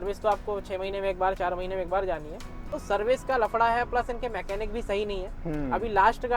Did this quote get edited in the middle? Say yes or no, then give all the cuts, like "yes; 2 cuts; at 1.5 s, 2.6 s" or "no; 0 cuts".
yes; 1 cut; at 2.8 s